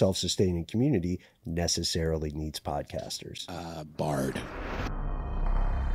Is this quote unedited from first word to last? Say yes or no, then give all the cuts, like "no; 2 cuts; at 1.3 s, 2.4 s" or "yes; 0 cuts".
no; 1 cut; at 4.8 s